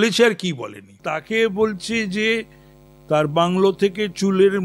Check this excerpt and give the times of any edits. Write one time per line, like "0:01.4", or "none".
0:01.1